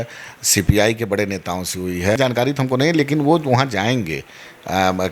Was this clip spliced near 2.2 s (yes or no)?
yes